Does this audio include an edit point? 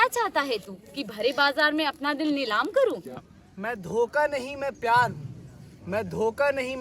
yes; 1 cut; at 3.3 s

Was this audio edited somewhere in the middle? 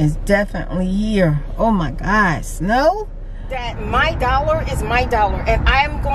yes; 1 cut; at 3.7 s

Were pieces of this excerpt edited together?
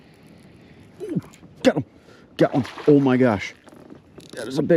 no; 0 cuts

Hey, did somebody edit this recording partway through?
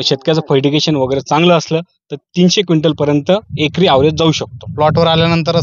yes; 1 cut; at 4.6 s

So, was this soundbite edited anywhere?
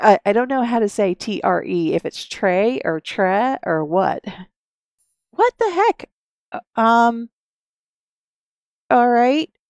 no; 0 cuts

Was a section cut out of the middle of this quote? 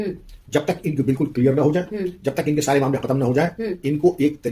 no; 0 cuts

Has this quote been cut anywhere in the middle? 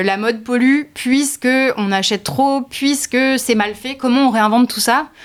no; 0 cuts

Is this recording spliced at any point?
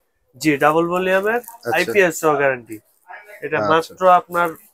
no; 0 cuts

